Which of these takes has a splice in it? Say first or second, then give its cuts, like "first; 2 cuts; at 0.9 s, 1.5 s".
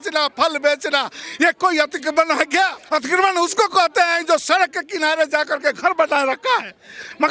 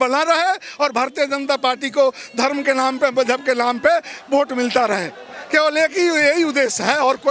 first; 2 cuts; at 1.2 s, 2.8 s